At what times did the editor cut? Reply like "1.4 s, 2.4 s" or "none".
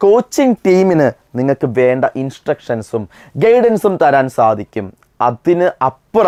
none